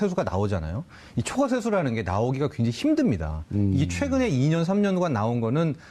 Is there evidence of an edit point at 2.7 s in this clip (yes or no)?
yes